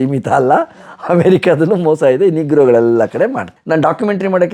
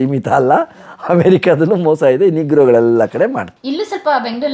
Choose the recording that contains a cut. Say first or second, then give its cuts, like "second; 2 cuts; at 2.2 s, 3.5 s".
first; 1 cut; at 3.5 s